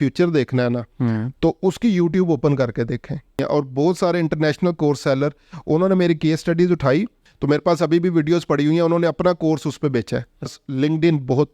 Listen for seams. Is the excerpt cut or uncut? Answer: cut